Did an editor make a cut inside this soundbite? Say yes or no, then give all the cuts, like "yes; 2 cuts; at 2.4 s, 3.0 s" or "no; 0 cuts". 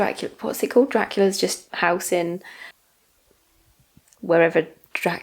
no; 0 cuts